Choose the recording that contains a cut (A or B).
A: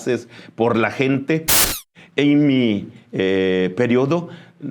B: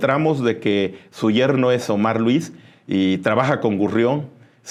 A